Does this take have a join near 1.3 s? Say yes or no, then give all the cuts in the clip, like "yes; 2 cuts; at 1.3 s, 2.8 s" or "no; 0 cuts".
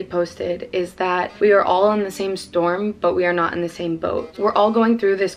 yes; 1 cut; at 1.3 s